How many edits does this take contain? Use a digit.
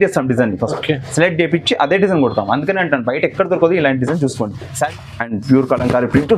1